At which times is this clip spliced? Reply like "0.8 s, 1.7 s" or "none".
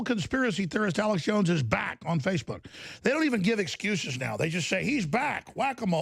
none